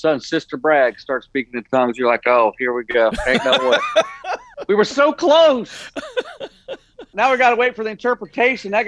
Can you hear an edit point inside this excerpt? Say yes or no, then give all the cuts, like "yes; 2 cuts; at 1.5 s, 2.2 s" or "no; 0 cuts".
yes; 2 cuts; at 4.4 s, 7.1 s